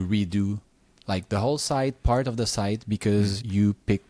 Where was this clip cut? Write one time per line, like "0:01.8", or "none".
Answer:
none